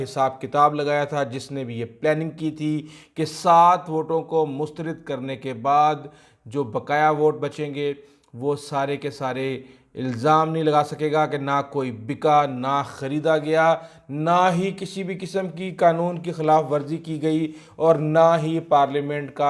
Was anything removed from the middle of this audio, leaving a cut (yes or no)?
no